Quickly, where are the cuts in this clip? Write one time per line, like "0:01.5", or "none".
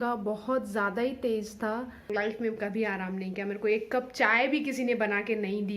0:02.0